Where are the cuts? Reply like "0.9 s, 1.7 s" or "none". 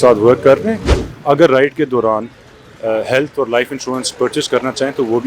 1.0 s